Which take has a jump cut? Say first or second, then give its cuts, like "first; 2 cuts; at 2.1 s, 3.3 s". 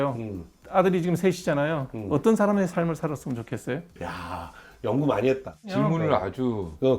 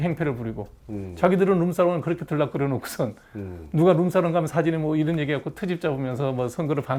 first; 2 cuts; at 4.0 s, 5.6 s